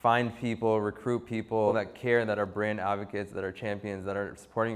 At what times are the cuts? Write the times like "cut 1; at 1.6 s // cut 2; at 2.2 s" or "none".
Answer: cut 1; at 1.7 s